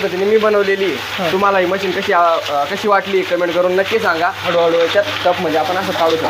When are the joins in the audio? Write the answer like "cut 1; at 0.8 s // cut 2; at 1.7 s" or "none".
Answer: cut 1; at 1.3 s // cut 2; at 4.4 s